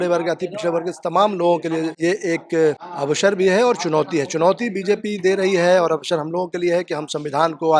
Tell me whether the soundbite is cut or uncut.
cut